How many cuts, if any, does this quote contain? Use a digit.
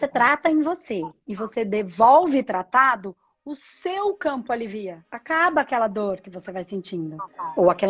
1